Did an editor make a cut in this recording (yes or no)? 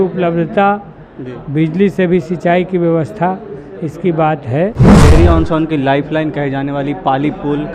yes